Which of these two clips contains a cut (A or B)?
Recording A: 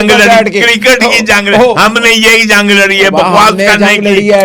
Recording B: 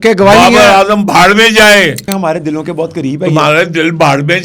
B